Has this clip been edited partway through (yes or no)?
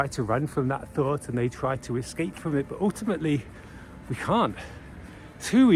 no